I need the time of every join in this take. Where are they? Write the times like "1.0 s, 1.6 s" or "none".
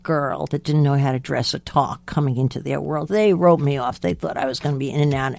none